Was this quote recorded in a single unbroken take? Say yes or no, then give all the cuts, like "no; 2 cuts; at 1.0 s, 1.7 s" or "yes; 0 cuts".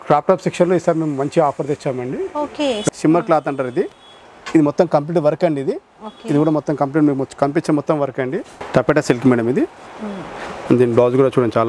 no; 2 cuts; at 2.8 s, 8.6 s